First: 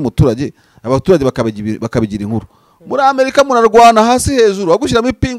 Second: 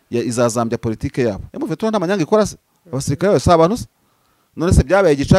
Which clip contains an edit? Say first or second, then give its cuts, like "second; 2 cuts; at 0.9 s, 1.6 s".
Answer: second; 1 cut; at 1.5 s